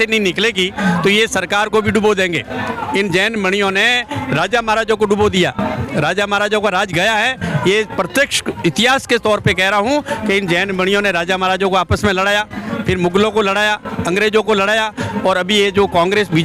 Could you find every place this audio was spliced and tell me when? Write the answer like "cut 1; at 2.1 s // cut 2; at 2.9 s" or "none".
none